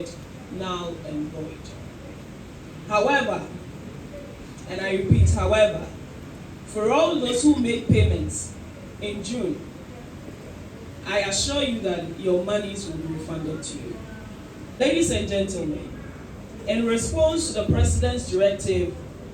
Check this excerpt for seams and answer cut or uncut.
cut